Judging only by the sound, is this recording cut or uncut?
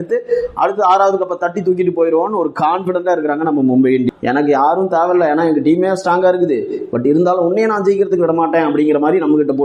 cut